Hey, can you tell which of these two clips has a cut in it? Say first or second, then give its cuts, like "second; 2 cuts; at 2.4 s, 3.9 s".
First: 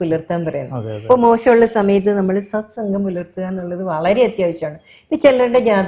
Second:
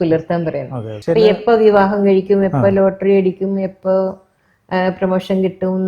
second; 1 cut; at 0.9 s